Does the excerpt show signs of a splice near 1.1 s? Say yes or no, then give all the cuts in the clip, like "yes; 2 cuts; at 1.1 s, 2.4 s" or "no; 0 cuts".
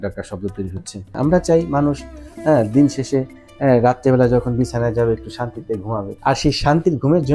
yes; 2 cuts; at 1.1 s, 6.1 s